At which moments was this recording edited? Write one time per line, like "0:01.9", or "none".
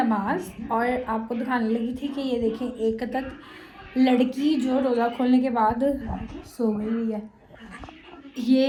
none